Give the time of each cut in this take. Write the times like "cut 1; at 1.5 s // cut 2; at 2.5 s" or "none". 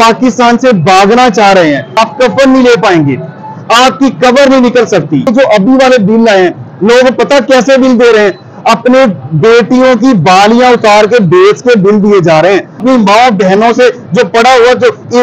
cut 1; at 1.9 s // cut 2; at 5.3 s // cut 3; at 12.8 s